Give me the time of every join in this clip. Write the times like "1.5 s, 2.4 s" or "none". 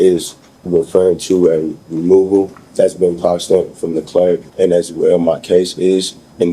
2.6 s, 4.5 s

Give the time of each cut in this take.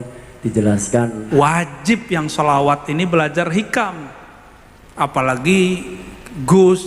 1.2 s

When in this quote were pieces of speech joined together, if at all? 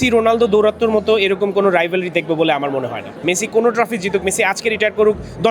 3.2 s

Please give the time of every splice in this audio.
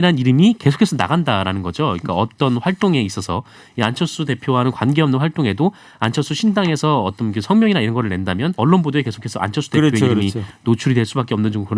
8.5 s

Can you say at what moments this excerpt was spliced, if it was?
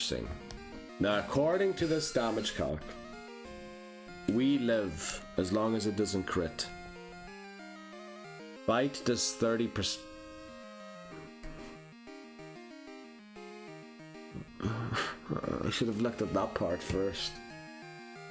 none

